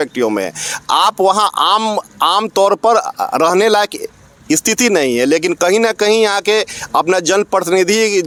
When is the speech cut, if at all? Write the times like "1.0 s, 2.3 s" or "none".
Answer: none